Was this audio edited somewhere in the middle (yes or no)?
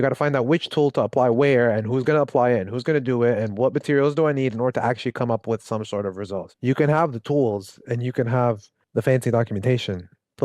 yes